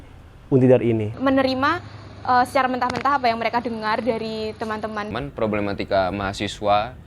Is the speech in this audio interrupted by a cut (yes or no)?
yes